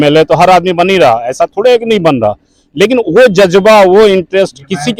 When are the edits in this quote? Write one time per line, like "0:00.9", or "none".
none